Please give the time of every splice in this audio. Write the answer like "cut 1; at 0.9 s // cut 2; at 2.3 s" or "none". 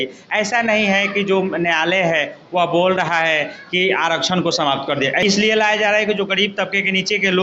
cut 1; at 5.2 s